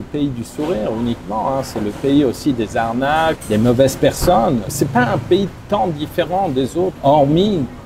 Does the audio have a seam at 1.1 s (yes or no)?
no